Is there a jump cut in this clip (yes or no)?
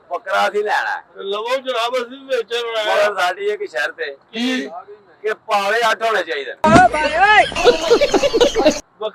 no